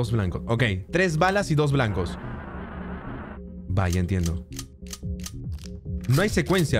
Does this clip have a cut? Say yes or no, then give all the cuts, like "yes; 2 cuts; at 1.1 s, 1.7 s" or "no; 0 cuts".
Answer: yes; 1 cut; at 3.6 s